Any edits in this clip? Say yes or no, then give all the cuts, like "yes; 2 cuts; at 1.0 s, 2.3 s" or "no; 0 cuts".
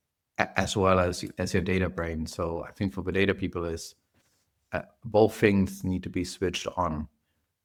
no; 0 cuts